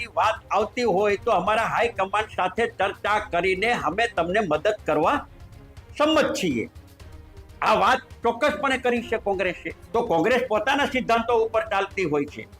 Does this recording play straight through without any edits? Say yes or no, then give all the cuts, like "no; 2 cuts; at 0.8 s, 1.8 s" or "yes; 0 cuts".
no; 1 cut; at 9.7 s